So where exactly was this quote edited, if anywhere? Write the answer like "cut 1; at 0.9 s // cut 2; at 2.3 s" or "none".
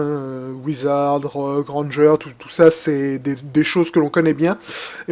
none